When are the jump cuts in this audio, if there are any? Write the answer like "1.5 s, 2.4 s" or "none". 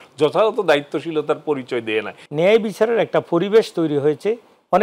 2.2 s